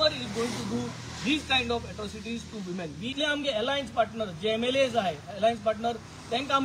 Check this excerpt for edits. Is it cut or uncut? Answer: cut